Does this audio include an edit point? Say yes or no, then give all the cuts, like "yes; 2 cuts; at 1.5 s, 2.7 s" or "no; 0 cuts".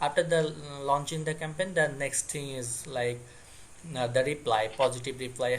no; 0 cuts